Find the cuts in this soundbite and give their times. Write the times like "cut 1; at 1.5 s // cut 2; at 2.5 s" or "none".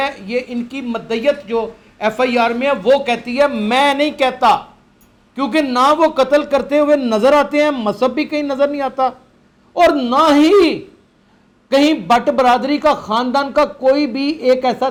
none